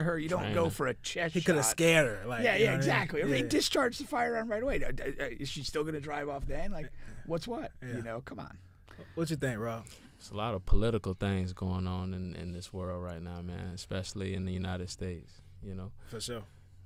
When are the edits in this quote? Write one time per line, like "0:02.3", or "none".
none